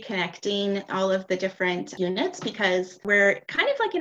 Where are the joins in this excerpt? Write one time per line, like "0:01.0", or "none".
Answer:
0:02.0
0:03.0